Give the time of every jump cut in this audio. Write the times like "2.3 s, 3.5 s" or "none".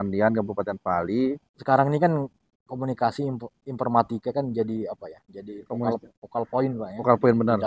1.5 s